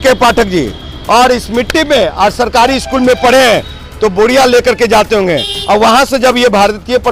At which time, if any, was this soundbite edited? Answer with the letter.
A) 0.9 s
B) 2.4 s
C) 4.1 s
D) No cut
D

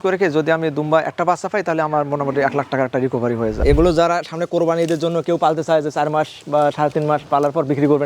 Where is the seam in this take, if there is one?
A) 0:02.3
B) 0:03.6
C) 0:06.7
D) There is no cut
B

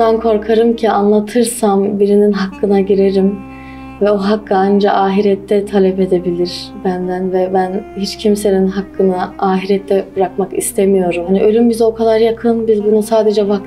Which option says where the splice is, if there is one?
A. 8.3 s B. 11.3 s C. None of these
B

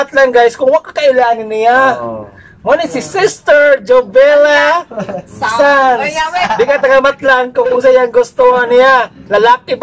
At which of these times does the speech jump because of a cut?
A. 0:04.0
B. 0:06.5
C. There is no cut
B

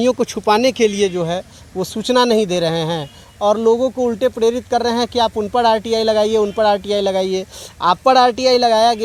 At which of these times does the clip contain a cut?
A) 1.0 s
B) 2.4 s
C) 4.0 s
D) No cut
D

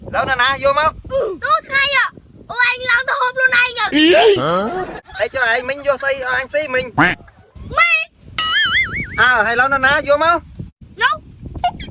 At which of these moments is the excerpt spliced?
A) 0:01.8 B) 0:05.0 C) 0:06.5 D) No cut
B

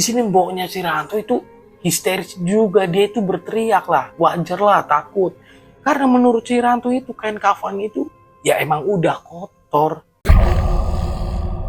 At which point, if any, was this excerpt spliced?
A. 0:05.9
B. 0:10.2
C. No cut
B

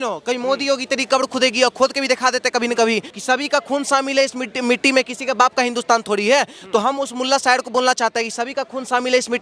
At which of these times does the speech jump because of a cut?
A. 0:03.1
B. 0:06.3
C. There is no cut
A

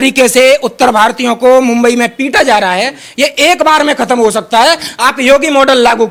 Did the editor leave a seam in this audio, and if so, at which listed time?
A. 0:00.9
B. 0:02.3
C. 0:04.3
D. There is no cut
D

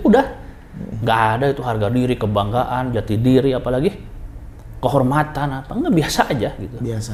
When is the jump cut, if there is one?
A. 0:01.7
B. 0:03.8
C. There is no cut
C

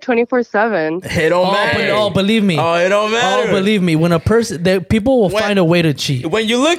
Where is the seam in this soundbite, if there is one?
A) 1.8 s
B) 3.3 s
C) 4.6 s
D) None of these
D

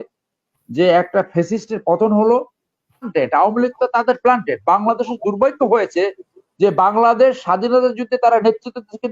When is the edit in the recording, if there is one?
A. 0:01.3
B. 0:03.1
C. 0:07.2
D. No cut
B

